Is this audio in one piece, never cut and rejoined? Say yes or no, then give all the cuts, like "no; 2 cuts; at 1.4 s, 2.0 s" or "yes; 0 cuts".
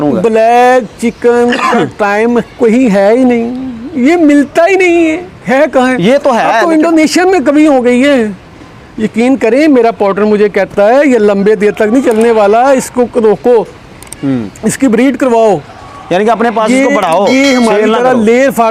yes; 0 cuts